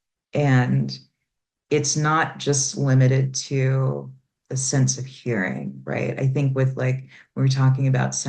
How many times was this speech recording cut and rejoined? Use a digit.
0